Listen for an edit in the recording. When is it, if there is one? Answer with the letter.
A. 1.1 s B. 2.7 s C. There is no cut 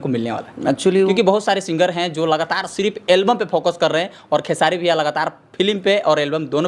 A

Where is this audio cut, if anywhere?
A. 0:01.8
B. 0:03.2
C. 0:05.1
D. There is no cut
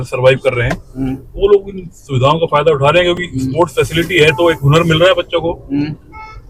D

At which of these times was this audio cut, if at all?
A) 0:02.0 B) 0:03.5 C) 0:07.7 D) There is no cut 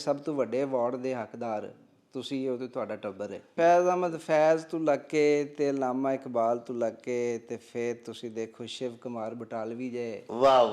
B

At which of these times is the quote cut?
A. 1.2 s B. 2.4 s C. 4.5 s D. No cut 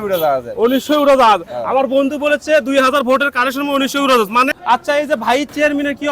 C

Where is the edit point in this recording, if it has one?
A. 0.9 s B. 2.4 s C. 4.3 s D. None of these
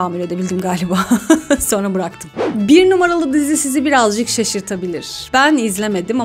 B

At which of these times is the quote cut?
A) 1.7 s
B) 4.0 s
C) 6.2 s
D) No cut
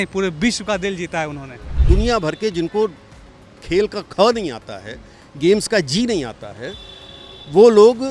A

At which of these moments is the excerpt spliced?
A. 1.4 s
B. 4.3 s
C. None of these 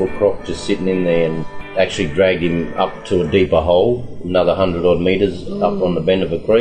A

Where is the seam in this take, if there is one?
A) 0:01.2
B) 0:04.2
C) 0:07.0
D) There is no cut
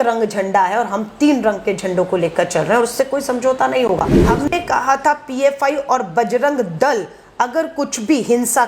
B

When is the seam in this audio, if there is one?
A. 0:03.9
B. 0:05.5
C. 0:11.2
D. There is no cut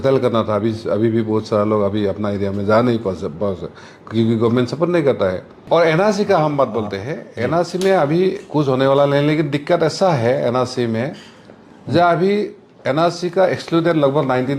B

